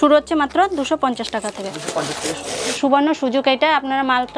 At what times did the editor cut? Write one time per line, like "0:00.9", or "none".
0:02.7